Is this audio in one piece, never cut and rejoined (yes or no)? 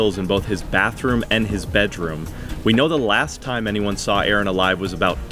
yes